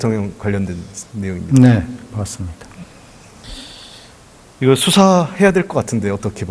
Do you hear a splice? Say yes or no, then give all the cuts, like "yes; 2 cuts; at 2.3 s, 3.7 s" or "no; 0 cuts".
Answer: yes; 1 cut; at 2.7 s